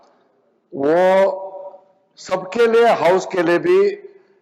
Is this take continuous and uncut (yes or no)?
yes